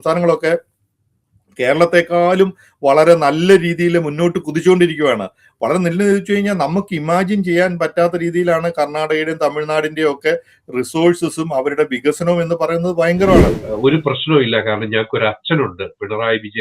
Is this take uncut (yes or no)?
no